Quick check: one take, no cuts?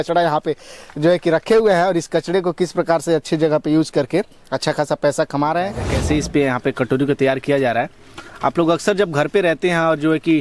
no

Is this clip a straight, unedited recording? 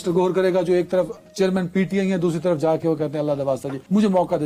yes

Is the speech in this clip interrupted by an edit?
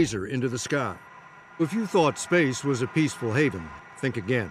yes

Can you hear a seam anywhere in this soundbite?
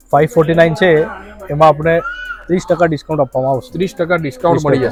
no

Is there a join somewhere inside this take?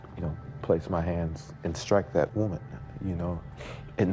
no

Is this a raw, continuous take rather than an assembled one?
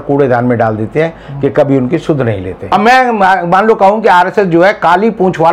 no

